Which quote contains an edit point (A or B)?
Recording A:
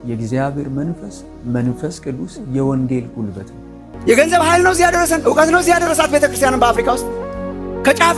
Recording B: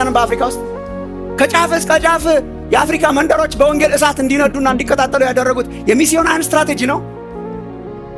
A